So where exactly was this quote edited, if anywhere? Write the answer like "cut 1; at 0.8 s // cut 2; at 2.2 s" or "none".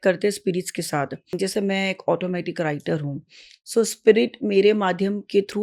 cut 1; at 1.3 s